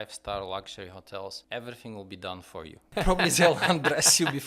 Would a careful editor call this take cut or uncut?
cut